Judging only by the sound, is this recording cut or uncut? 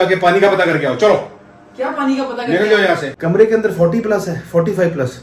cut